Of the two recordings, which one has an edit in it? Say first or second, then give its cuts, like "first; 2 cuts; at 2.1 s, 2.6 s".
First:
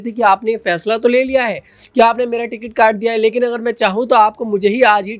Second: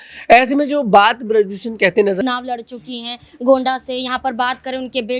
second; 1 cut; at 2.2 s